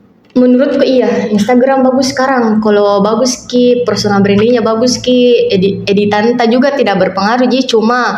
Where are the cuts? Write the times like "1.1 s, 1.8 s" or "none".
none